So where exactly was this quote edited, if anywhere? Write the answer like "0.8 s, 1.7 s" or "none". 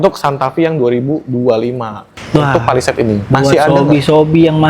2.1 s